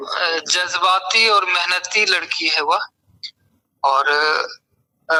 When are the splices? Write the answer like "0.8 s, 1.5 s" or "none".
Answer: none

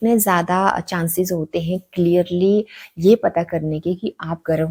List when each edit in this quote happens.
none

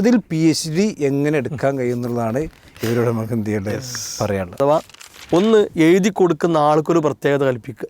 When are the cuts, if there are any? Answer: 4.6 s

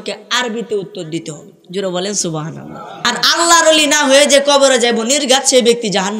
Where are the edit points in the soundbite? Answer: 3.1 s

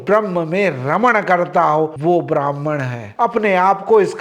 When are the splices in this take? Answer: 3.0 s

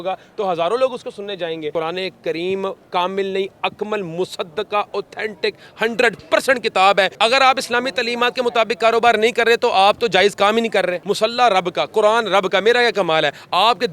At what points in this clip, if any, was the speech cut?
1.7 s, 7.1 s, 11.0 s

